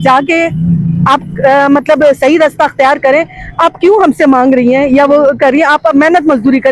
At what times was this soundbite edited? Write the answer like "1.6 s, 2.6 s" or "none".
none